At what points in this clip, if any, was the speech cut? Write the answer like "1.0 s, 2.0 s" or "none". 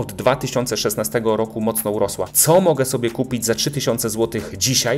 2.3 s